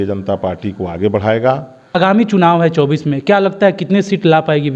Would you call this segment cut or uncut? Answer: cut